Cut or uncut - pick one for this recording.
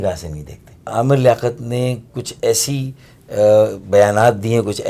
cut